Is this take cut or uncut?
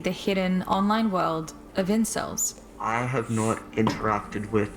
uncut